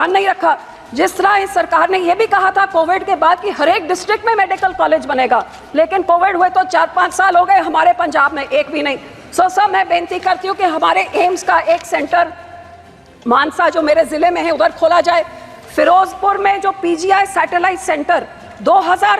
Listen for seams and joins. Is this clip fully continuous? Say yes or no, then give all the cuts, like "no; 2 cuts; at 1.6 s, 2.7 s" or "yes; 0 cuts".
yes; 0 cuts